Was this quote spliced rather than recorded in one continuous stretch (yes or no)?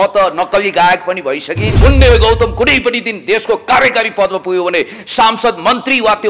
yes